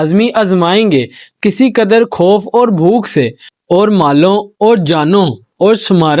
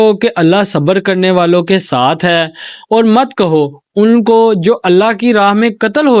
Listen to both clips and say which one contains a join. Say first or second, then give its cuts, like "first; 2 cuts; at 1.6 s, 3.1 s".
first; 1 cut; at 3.5 s